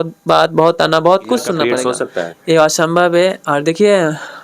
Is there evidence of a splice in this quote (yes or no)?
yes